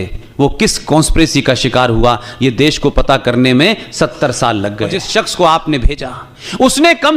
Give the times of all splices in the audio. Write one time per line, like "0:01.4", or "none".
0:05.1